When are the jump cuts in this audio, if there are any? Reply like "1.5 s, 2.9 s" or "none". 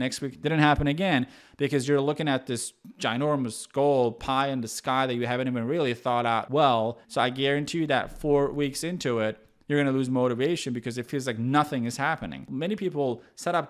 7.0 s, 12.4 s